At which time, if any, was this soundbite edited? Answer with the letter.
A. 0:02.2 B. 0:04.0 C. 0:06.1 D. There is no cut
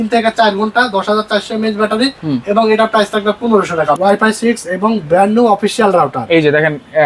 B